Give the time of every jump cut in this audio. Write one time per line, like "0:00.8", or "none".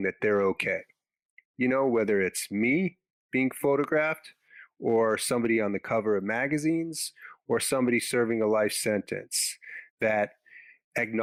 none